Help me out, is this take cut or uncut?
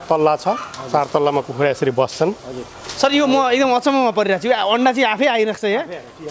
uncut